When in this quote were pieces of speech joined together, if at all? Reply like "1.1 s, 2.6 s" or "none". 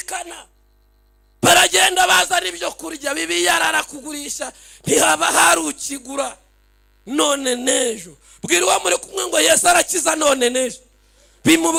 none